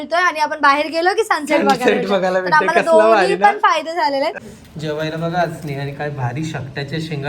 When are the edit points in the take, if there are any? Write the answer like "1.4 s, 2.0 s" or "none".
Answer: 4.4 s